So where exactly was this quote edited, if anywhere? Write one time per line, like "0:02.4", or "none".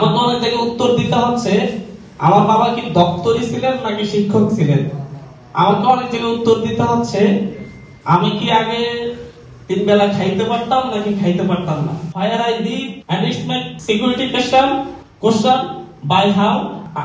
0:12.1
0:13.5